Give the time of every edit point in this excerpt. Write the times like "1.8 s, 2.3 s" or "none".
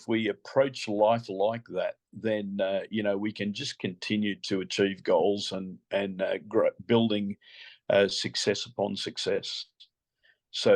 none